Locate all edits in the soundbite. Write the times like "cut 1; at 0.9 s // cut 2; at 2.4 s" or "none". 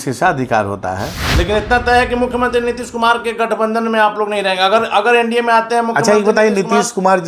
cut 1; at 1.2 s